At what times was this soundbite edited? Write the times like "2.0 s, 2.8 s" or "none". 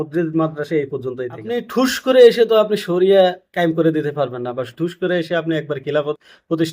1.4 s